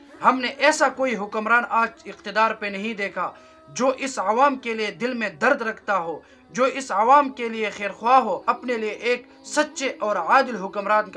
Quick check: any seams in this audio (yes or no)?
yes